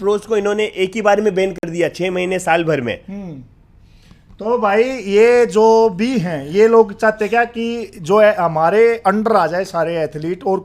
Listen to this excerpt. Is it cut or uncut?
uncut